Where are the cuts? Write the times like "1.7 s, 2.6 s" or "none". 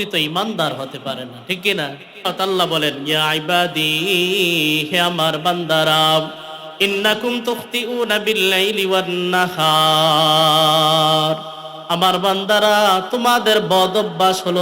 2.2 s